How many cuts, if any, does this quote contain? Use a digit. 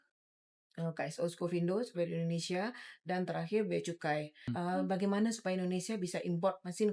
1